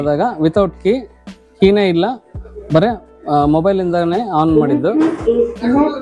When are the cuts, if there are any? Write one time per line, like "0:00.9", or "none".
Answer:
none

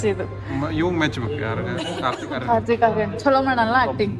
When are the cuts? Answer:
none

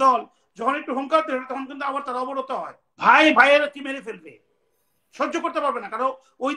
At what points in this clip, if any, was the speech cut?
0:02.8

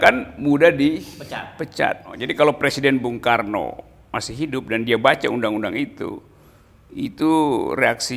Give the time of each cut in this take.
0:02.2

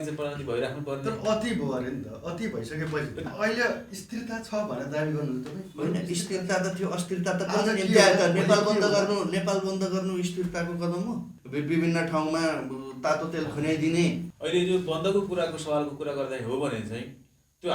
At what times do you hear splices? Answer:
0:03.3
0:11.3
0:14.3

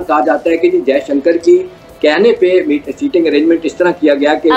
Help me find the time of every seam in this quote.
none

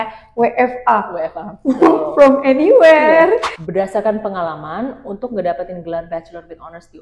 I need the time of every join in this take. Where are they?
0:03.6

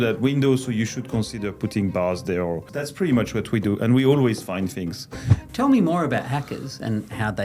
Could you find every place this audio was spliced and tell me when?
0:02.7
0:05.4

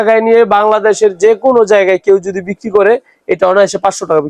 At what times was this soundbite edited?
none

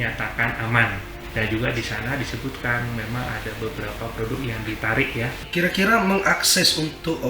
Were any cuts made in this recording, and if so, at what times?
0:01.1
0:05.4

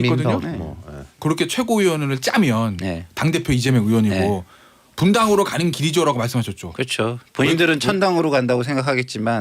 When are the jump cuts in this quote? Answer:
0:01.1

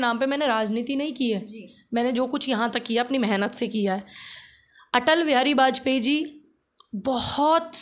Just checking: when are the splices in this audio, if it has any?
none

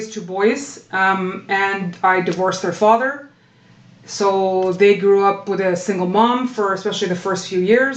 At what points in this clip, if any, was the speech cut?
none

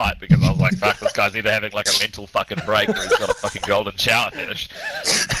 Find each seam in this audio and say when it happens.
none

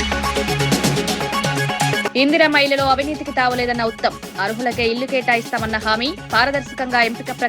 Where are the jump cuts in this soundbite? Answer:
0:02.1

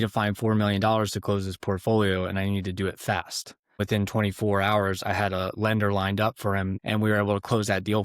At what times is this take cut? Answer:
0:03.8
0:06.7

